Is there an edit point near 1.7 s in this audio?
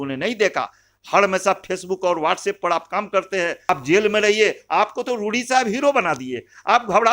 no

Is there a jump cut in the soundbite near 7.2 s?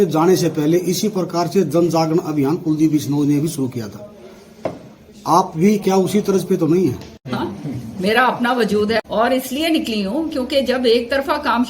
yes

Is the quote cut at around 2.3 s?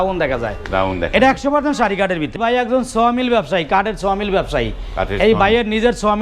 yes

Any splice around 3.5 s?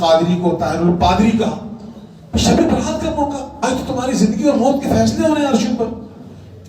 yes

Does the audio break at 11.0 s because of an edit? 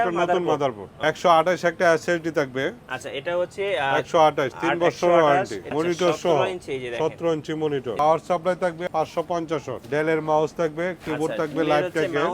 no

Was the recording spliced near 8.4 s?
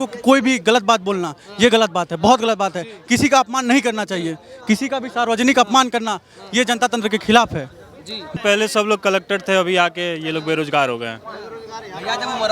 yes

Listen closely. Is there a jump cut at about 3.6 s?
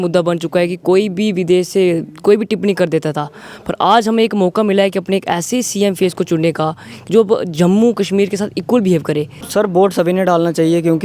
no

